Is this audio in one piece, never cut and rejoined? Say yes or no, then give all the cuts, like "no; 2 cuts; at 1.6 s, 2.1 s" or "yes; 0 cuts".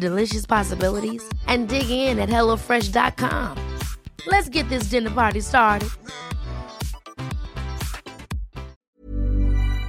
no; 1 cut; at 8.9 s